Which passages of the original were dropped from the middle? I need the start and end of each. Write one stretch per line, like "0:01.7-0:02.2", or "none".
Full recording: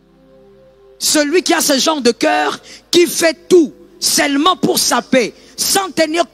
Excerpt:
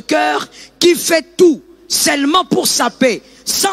none